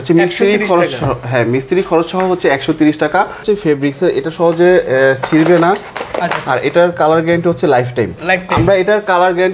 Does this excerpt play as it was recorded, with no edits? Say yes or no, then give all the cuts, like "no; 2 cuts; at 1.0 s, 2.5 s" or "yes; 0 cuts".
no; 2 cuts; at 3.4 s, 8.2 s